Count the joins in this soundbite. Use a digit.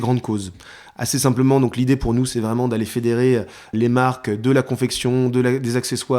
1